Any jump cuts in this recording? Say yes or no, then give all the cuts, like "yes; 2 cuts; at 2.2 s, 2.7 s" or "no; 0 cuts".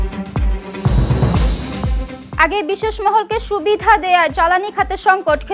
yes; 1 cut; at 2.2 s